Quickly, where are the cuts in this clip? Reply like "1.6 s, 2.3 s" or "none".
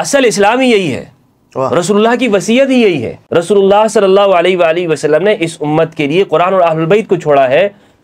3.1 s